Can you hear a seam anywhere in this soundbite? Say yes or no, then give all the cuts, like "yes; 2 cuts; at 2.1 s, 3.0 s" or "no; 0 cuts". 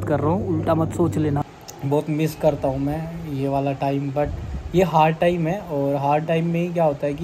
yes; 1 cut; at 1.6 s